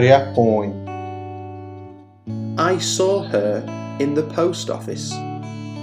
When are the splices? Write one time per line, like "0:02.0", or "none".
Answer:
0:00.8
0:02.1